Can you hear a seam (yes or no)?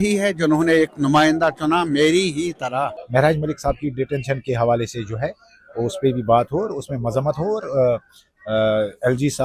yes